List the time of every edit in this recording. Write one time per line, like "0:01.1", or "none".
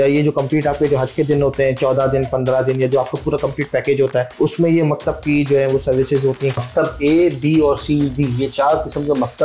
0:04.3
0:06.6